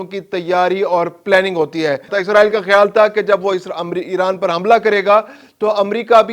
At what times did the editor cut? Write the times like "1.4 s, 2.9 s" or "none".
2.1 s